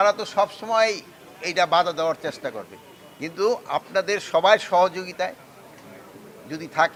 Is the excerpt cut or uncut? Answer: uncut